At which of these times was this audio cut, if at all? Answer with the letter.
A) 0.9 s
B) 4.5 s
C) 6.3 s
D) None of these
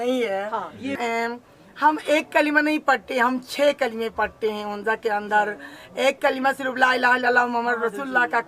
A